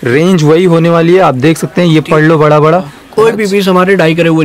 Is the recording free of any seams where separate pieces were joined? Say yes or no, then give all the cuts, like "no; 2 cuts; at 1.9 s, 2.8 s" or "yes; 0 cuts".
no; 1 cut; at 3.0 s